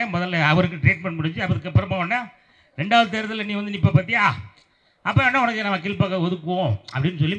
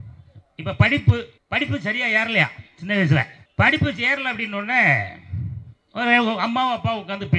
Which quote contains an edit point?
second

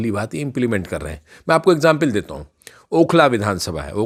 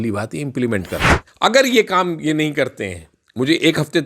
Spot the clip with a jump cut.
second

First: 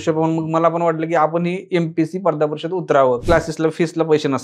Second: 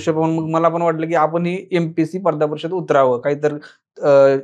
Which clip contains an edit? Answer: first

